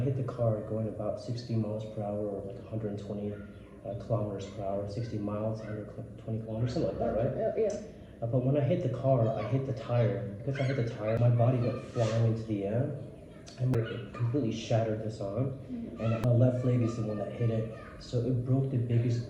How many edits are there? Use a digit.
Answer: 3